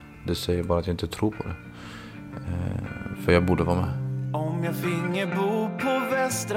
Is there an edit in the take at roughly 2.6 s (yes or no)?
no